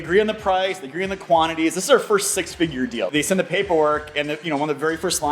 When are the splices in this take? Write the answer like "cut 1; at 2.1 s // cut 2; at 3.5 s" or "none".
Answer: cut 1; at 3.1 s